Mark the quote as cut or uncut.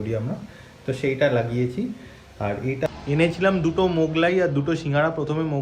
cut